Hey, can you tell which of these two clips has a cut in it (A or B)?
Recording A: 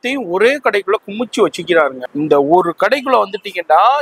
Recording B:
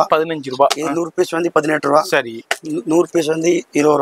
A